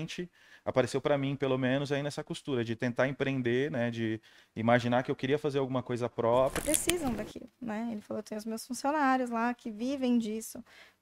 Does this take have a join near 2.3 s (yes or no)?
no